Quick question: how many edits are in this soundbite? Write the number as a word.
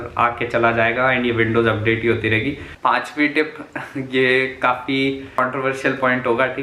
two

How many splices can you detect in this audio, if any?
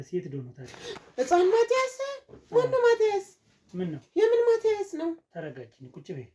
zero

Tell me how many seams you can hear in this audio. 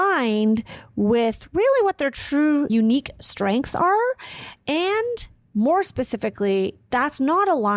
one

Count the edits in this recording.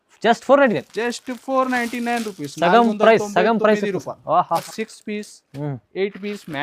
one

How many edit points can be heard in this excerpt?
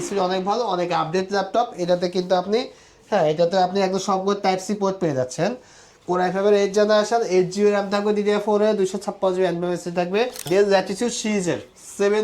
one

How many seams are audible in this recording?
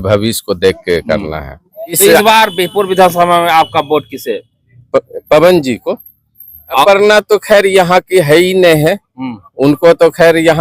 two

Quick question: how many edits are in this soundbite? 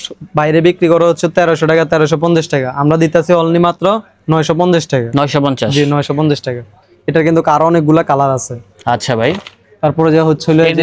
zero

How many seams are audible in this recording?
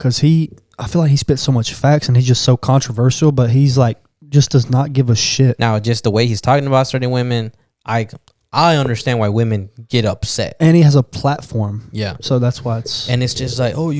one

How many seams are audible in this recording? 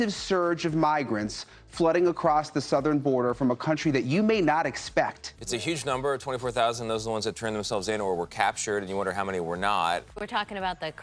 two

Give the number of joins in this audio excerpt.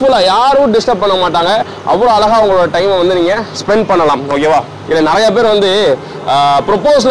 one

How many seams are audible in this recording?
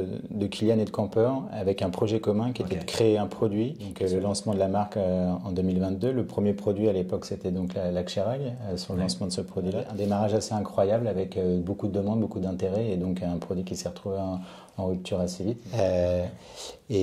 three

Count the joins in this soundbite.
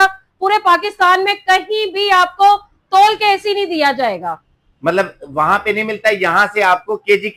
zero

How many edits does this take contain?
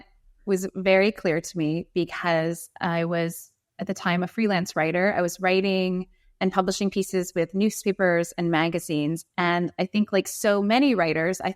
zero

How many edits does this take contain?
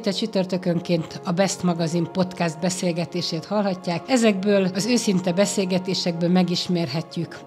zero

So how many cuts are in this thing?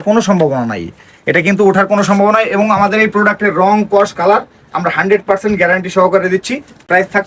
zero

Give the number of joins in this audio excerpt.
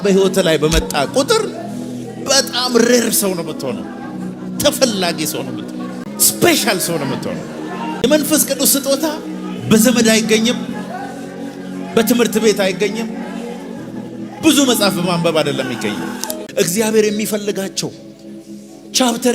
three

